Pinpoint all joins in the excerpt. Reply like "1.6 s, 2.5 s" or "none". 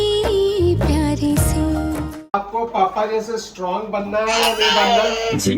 2.3 s